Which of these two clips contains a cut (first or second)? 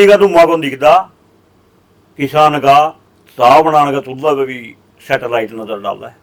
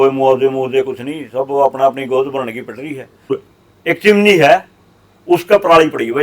second